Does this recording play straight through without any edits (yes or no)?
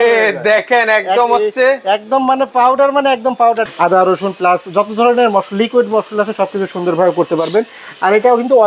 no